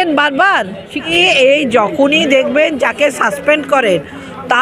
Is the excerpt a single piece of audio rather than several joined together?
no; 1 cut; at 1.1 s

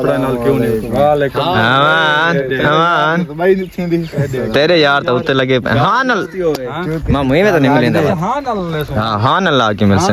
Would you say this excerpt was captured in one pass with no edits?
yes; 0 cuts

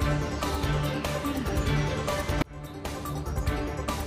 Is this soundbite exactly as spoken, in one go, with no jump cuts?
yes; 0 cuts

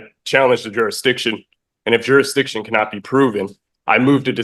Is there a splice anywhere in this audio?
no; 0 cuts

